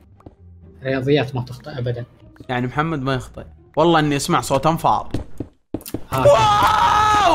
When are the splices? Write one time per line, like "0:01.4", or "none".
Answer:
none